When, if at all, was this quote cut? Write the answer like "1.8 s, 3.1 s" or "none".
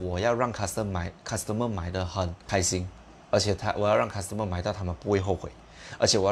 2.4 s

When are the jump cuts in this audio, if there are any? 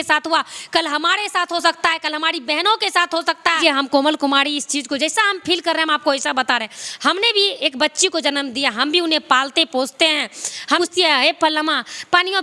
3.6 s, 10.8 s

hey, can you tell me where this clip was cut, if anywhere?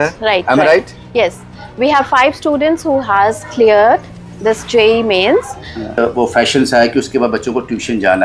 6.0 s

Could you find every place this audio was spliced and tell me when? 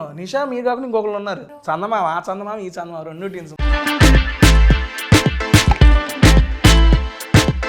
1.5 s, 3.5 s

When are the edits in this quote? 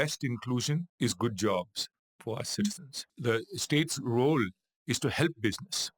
0.9 s, 3.1 s

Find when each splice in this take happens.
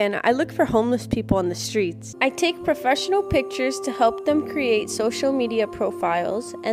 2.1 s

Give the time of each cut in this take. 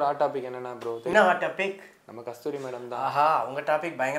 1.1 s

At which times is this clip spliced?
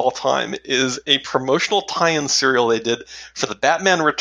none

